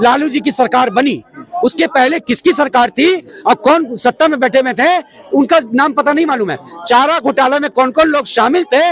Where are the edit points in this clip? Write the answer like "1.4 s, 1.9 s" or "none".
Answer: none